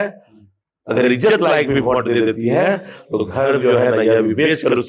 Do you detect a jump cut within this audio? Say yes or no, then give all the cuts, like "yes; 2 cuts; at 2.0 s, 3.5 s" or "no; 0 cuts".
no; 0 cuts